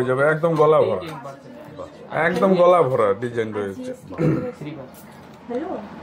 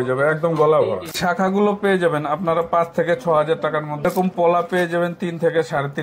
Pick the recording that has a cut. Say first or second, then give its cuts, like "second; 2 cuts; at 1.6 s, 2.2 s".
second; 2 cuts; at 1.1 s, 4.1 s